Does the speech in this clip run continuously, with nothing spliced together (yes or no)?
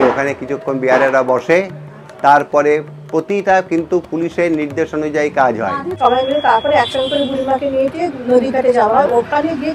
no